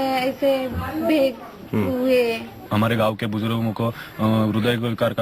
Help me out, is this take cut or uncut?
cut